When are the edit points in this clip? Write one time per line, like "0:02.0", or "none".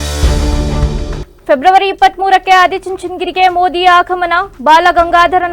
0:01.2